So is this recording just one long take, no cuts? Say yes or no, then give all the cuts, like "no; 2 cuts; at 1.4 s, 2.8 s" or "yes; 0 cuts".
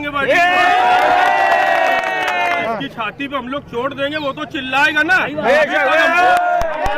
no; 1 cut; at 2.6 s